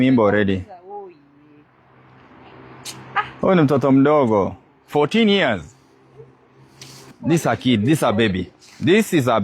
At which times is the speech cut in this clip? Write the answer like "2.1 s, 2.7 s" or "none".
7.1 s